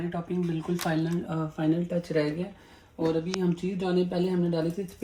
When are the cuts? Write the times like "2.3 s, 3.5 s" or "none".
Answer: none